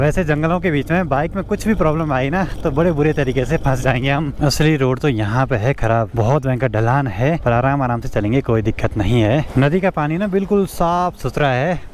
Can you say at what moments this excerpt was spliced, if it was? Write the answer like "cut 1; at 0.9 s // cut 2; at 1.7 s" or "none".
none